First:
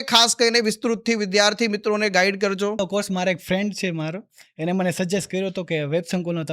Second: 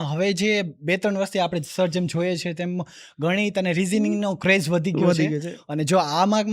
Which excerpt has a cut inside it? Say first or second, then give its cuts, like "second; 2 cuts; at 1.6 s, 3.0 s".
first; 1 cut; at 2.8 s